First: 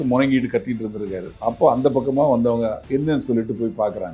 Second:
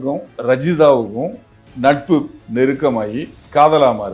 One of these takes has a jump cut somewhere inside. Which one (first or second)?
first